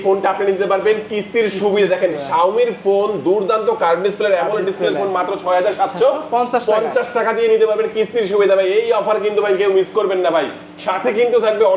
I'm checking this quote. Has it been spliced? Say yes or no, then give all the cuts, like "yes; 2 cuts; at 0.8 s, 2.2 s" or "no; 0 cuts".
no; 0 cuts